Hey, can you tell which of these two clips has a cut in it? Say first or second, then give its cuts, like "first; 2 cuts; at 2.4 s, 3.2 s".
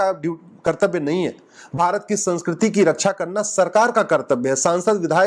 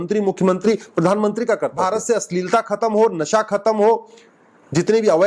second; 1 cut; at 1.7 s